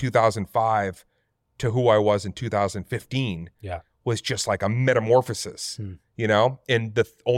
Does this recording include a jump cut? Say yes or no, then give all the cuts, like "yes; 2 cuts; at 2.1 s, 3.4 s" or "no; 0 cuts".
no; 0 cuts